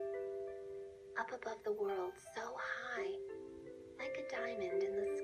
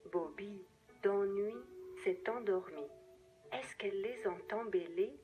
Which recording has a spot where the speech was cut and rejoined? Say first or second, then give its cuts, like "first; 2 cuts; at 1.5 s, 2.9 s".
second; 1 cut; at 1.3 s